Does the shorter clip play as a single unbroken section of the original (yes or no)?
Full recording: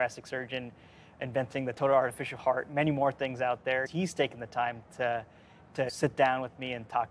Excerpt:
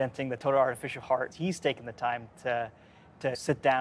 no